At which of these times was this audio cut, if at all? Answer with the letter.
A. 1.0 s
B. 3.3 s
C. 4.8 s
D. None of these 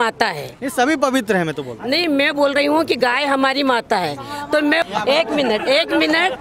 C